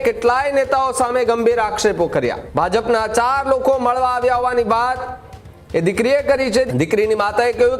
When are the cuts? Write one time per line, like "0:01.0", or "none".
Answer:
0:02.4
0:06.7